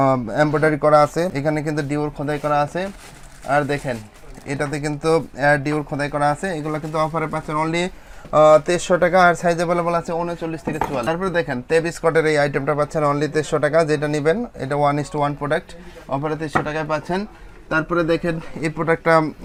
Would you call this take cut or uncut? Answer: uncut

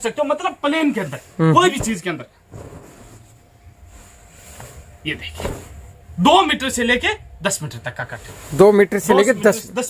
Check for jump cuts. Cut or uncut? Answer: uncut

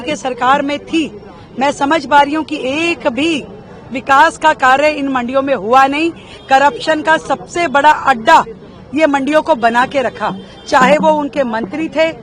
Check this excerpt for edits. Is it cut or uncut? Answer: uncut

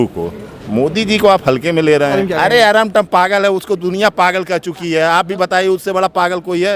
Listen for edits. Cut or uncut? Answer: cut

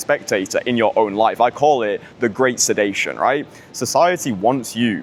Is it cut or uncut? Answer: uncut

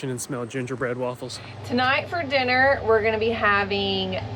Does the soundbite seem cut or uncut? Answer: cut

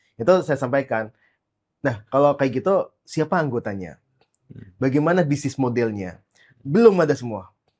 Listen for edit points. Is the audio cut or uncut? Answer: uncut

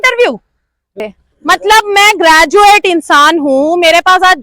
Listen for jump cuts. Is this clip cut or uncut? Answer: cut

